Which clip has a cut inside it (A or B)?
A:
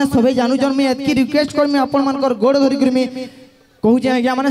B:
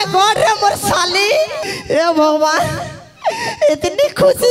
B